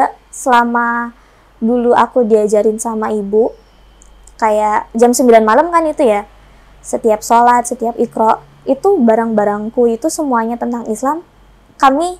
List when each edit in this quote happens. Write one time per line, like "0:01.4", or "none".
none